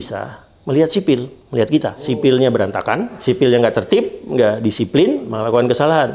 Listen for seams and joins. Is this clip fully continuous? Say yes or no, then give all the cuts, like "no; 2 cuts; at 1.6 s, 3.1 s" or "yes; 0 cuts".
no; 3 cuts; at 2.1 s, 3.2 s, 5.3 s